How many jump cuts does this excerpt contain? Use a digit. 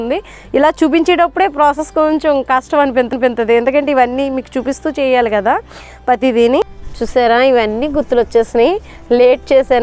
1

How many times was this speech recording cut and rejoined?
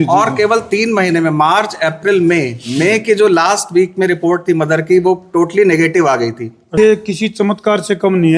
1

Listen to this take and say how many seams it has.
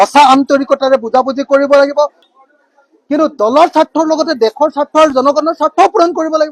1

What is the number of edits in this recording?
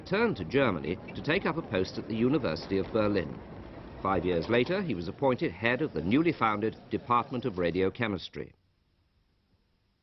1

